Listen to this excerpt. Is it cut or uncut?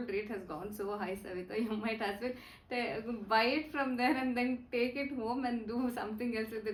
uncut